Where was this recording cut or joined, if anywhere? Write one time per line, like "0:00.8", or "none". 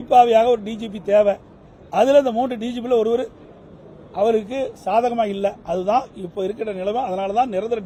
none